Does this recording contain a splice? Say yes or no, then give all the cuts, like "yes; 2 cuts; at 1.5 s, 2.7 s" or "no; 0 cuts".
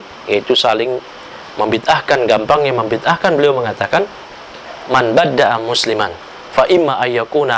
no; 0 cuts